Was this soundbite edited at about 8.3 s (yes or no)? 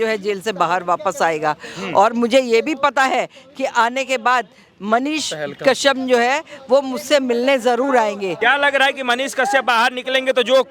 yes